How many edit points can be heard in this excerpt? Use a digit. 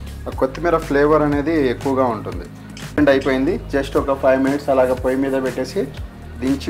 1